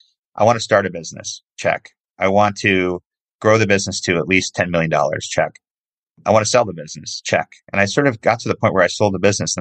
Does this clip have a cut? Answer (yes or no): no